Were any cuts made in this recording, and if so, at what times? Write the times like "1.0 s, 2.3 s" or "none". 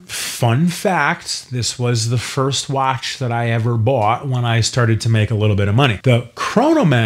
6.0 s